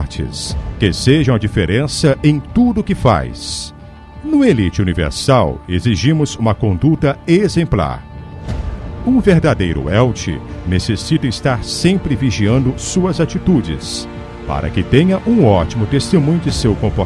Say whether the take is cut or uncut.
cut